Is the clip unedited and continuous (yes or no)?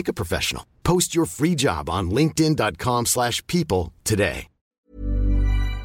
no